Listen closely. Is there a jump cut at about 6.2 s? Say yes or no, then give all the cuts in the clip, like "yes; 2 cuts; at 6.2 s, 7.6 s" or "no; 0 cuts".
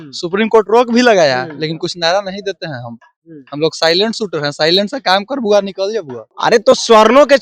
yes; 1 cut; at 6.2 s